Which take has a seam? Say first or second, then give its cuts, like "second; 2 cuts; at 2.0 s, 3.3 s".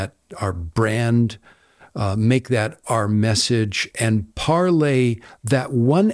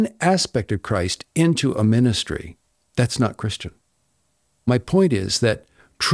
second; 1 cut; at 4.7 s